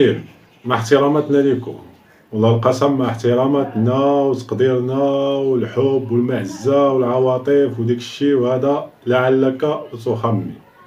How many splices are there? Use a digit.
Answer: 0